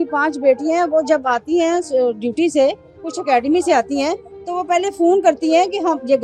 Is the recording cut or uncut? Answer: uncut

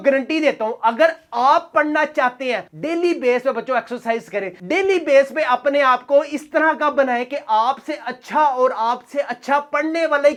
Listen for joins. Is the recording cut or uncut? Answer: uncut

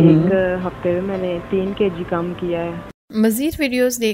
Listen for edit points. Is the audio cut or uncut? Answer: cut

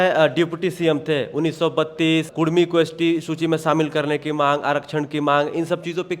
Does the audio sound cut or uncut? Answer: cut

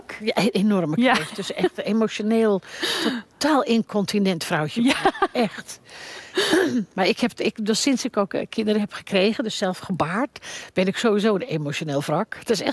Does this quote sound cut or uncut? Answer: uncut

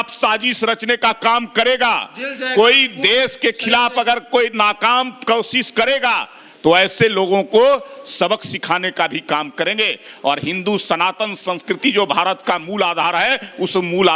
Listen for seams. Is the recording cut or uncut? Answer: uncut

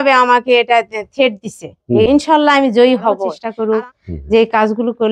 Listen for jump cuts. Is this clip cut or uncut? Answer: cut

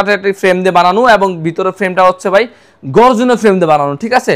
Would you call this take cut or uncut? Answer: uncut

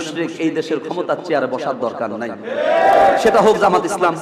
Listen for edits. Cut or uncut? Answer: cut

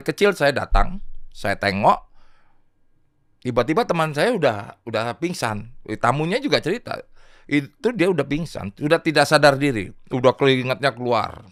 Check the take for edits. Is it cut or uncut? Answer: uncut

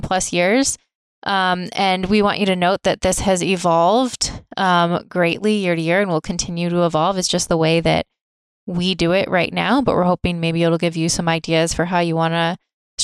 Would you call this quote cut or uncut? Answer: uncut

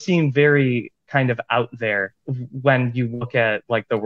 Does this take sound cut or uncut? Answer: uncut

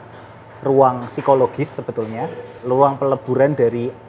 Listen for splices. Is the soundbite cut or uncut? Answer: cut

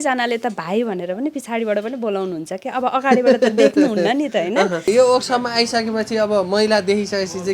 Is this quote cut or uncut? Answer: cut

